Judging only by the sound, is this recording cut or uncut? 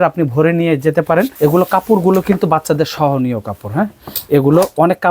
cut